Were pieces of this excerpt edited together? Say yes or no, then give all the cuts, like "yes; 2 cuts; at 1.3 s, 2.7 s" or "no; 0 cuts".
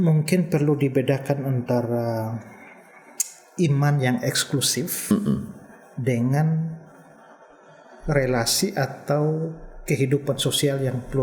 no; 0 cuts